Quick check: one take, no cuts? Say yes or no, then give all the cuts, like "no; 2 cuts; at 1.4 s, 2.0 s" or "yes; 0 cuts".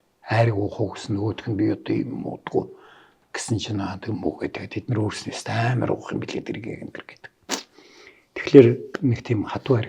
no; 1 cut; at 8.9 s